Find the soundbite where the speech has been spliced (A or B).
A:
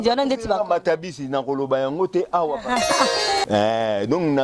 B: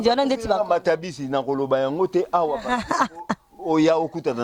A